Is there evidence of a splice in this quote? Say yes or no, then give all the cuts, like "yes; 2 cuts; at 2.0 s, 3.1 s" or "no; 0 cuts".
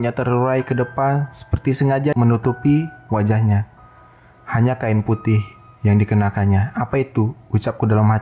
yes; 1 cut; at 2.1 s